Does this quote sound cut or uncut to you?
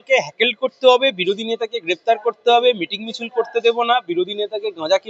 uncut